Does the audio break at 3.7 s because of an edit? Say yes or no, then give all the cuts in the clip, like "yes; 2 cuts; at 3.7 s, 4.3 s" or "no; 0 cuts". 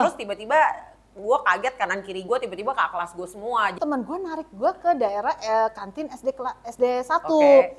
yes; 1 cut; at 3.7 s